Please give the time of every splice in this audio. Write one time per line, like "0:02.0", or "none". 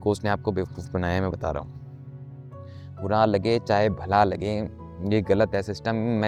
none